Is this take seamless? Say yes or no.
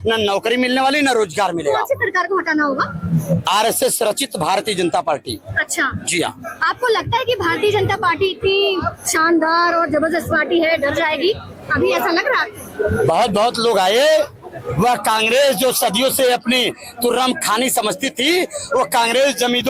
yes